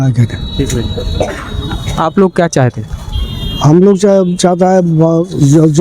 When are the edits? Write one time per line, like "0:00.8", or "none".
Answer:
none